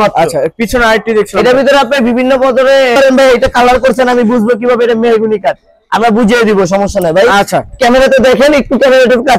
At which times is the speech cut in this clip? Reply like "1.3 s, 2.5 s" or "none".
3.0 s